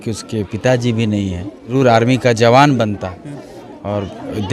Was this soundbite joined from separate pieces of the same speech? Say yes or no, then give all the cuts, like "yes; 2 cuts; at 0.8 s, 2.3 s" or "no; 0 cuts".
yes; 1 cut; at 1.7 s